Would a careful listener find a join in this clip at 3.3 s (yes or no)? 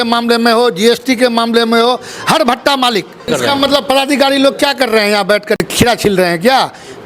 yes